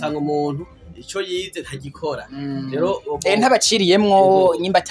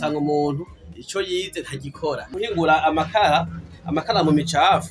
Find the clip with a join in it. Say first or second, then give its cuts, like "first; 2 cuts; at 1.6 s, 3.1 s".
second; 1 cut; at 2.3 s